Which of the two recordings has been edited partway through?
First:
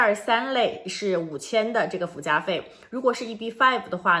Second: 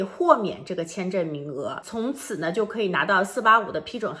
second; 1 cut; at 1.8 s

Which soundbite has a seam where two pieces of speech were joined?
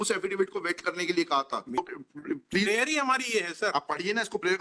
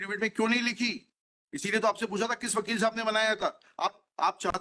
first; 1 cut; at 1.8 s

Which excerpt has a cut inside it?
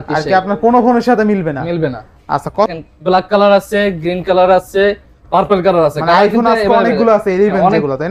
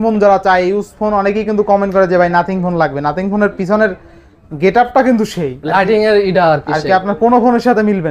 first; 1 cut; at 2.6 s

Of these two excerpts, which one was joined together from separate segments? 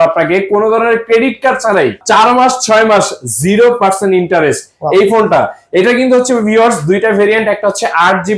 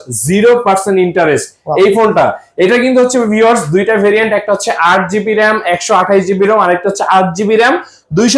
first; 1 cut; at 2.0 s

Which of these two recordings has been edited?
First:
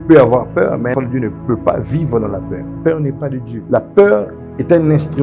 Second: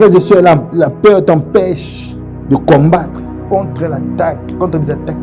first; 3 cuts; at 0.9 s, 2.6 s, 3.5 s

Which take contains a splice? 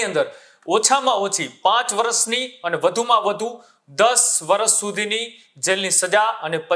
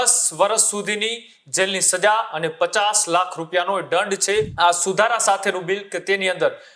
second; 1 cut; at 4.5 s

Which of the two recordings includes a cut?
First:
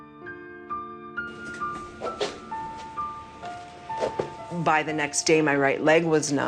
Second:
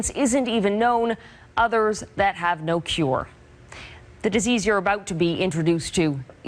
second; 1 cut; at 3.4 s

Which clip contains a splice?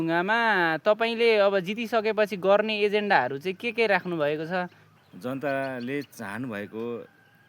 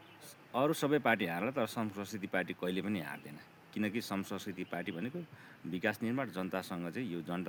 first; 1 cut; at 4.8 s

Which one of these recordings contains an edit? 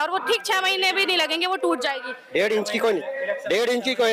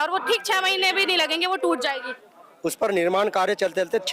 second; 1 cut; at 2.1 s

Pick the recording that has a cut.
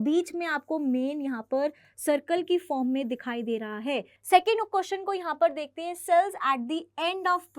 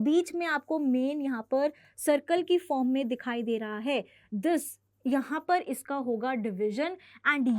first; 1 cut; at 4.1 s

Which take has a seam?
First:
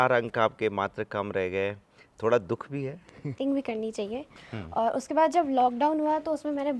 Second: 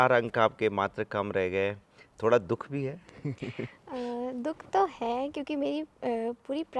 first; 1 cut; at 3.4 s

